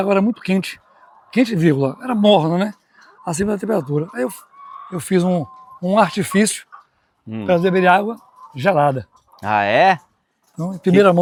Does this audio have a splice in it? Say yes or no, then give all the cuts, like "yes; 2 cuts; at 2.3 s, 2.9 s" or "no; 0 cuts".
no; 0 cuts